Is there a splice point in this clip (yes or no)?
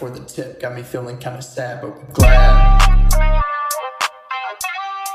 no